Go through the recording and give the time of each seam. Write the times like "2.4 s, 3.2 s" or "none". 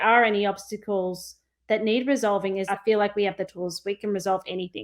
2.6 s

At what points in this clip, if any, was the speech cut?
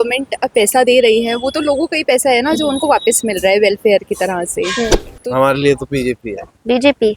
5.1 s

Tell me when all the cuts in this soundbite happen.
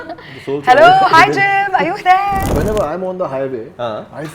2.5 s

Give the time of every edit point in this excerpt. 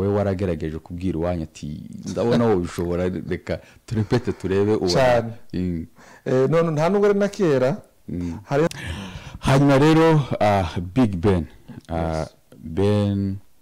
8.7 s

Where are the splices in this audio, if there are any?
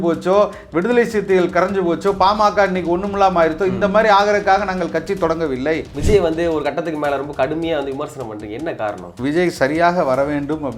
5.9 s, 9.1 s

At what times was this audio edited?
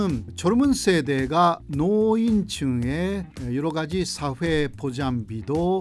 1.6 s

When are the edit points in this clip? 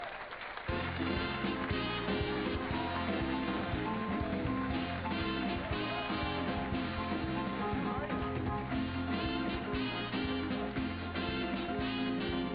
4.9 s

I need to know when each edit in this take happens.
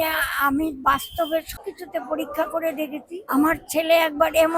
1.5 s, 3.2 s

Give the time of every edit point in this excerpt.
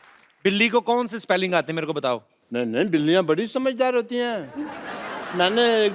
2.4 s

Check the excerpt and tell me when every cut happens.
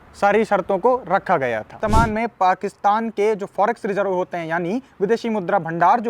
1.8 s

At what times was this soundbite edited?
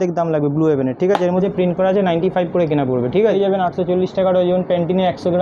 1.4 s, 3.3 s

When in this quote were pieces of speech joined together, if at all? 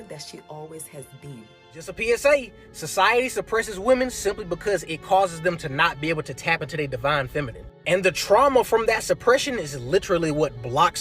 2.0 s

